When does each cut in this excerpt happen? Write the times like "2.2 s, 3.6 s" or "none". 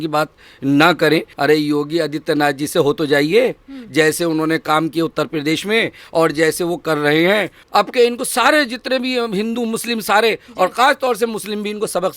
1.3 s, 7.5 s